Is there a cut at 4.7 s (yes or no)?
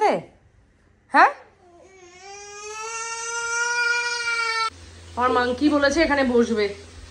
yes